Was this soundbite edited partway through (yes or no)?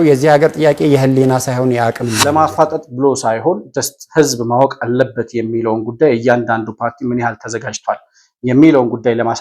yes